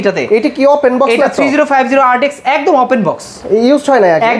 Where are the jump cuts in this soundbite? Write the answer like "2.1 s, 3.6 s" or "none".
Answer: none